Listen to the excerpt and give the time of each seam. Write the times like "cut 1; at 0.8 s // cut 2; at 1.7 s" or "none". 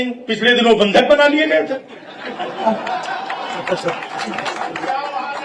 none